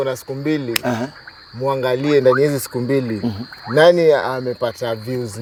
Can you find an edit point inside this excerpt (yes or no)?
no